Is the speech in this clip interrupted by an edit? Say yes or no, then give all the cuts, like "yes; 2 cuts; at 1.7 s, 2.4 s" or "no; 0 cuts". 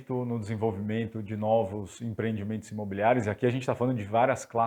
no; 0 cuts